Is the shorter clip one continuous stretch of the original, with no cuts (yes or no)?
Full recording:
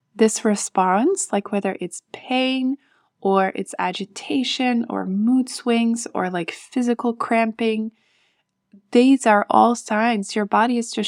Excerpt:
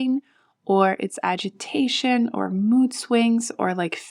yes